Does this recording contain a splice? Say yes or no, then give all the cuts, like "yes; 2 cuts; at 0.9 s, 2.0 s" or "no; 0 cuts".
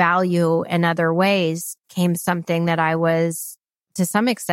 no; 0 cuts